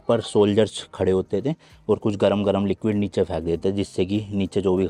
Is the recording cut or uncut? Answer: uncut